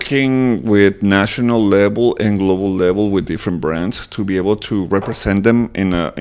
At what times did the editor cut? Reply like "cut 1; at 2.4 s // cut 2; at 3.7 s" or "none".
none

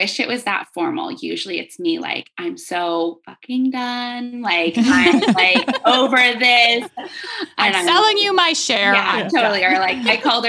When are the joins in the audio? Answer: cut 1; at 6.6 s

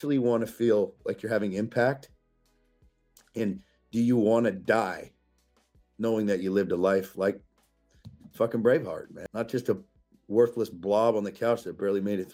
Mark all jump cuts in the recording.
cut 1; at 9.2 s

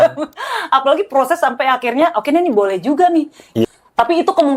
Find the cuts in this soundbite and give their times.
cut 1; at 3.6 s

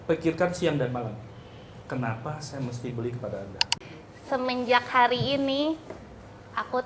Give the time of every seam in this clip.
cut 1; at 3.8 s

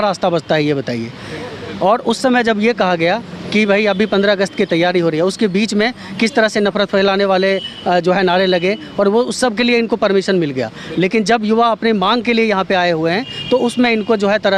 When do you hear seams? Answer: none

